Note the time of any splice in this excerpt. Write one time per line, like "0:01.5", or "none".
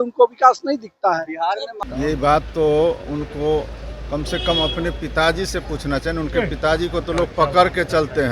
0:01.7